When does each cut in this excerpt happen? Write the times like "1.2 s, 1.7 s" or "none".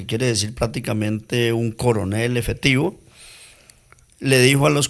none